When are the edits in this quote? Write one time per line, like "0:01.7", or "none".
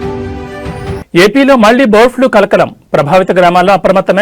0:00.9